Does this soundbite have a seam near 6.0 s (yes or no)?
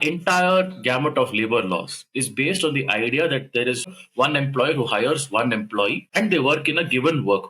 yes